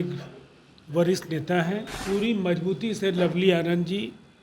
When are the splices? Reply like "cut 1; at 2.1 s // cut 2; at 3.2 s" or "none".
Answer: cut 1; at 1.9 s